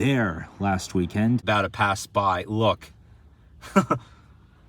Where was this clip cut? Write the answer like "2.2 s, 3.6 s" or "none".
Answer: 1.4 s